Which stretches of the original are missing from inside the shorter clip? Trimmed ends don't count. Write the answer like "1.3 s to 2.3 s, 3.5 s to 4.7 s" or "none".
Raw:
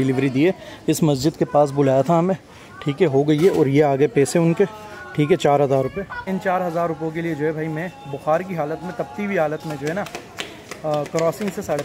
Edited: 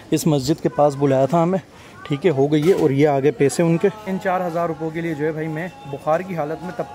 4.8 s to 6.3 s